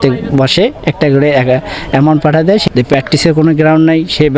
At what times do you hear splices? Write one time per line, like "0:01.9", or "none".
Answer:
0:02.7